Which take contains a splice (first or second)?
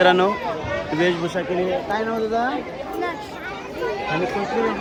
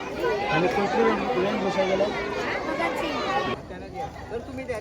second